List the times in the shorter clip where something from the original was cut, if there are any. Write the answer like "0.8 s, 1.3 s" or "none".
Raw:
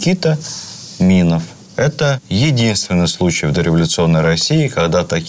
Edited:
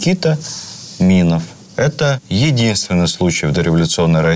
none